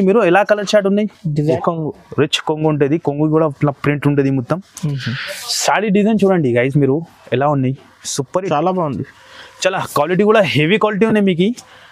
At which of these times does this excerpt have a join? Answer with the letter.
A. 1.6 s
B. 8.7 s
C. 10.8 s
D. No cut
A